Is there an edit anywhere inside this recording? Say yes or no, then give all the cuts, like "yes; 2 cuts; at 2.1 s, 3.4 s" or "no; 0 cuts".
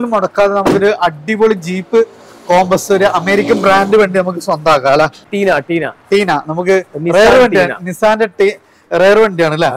yes; 1 cut; at 5.2 s